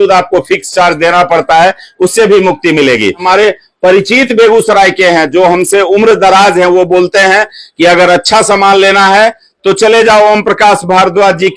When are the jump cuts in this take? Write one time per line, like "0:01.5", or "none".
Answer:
0:03.2